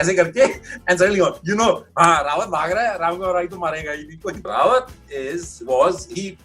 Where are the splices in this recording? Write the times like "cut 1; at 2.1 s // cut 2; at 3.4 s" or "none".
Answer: cut 1; at 4.4 s